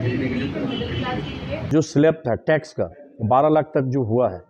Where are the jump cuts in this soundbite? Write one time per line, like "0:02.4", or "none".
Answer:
0:01.5